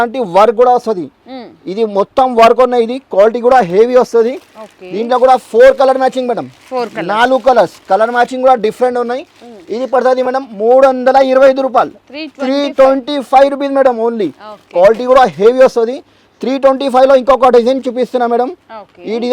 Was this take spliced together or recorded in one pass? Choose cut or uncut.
uncut